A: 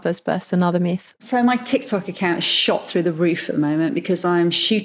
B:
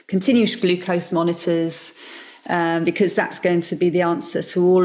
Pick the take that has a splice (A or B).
A